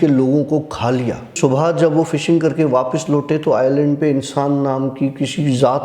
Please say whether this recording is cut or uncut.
cut